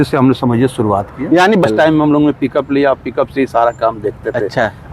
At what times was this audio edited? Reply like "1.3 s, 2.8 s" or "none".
1.3 s